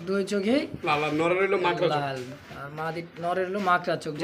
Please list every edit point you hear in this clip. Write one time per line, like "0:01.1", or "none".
none